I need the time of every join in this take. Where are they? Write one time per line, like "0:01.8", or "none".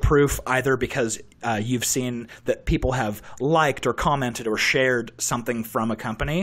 none

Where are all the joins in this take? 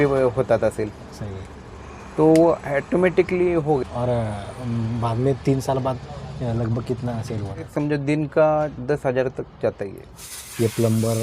0:03.8
0:07.7
0:10.2

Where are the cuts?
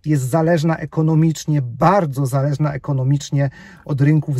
none

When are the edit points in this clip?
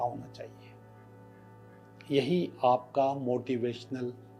none

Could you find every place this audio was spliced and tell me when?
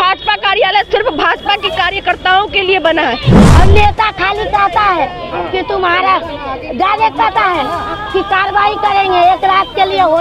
0:03.4

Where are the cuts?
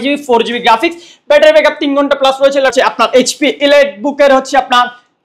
0:02.7

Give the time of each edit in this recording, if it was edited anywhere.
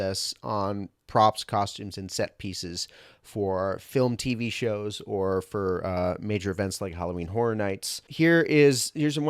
0:08.1

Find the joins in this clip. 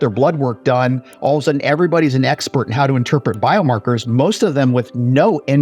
none

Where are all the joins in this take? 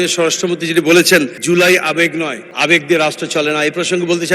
0:01.3
0:02.4

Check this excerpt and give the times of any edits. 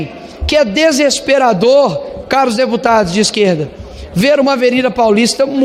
none

